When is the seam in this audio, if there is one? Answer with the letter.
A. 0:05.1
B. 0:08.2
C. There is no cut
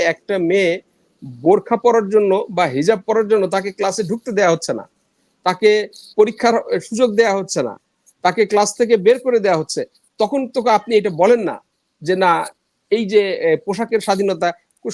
C